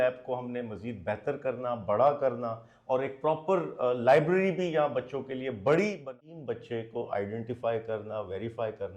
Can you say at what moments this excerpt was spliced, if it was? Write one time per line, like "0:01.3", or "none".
0:06.0